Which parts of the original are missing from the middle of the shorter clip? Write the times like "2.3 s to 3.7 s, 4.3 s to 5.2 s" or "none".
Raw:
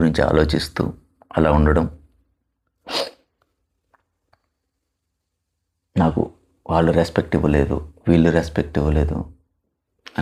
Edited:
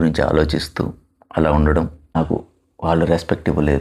2.2 s to 6.0 s